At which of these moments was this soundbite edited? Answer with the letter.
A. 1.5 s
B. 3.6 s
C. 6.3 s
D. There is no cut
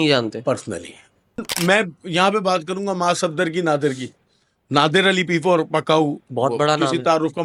A